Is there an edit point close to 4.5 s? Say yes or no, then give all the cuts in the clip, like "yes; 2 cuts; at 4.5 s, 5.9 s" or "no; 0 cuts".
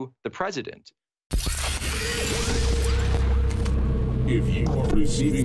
no; 1 cut; at 1.4 s